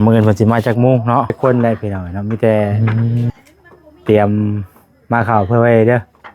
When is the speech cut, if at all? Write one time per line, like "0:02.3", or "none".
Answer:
0:01.4